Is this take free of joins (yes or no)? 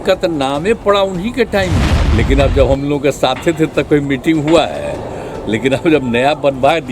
no